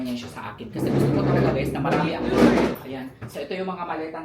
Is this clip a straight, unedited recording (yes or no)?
no